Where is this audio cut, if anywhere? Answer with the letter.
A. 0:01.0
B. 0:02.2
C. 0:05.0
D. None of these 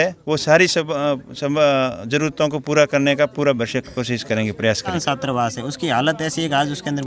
C